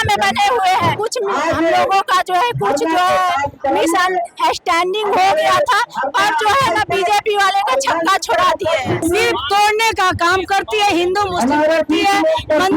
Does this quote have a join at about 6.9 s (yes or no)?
no